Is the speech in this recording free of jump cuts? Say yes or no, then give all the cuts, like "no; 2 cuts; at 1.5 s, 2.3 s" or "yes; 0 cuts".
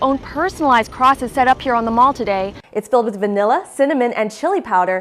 no; 1 cut; at 2.6 s